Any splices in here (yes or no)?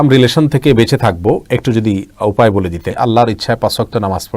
yes